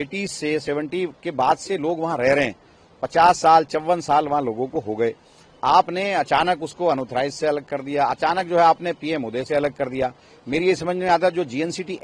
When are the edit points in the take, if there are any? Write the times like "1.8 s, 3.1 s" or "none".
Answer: none